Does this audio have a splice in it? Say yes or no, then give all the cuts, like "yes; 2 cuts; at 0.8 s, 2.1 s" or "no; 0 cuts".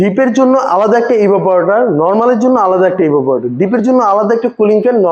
no; 0 cuts